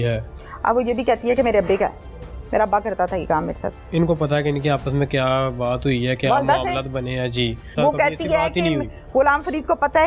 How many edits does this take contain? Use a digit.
2